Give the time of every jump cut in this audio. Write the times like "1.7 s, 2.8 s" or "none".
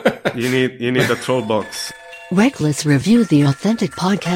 1.8 s